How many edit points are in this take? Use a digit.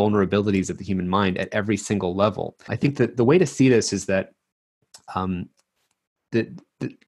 1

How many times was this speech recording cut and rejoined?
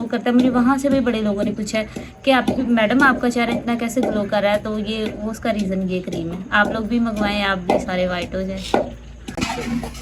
0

